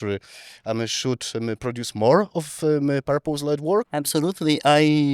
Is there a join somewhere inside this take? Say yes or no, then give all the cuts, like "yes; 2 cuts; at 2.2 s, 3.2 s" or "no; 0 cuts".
yes; 1 cut; at 3.9 s